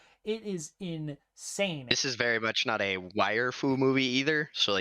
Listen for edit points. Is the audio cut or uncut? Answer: cut